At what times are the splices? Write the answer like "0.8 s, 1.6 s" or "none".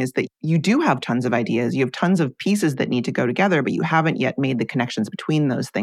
none